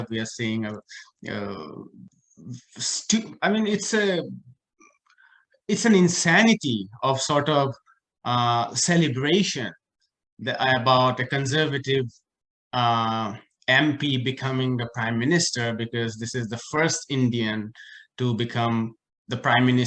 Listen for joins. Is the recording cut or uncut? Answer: uncut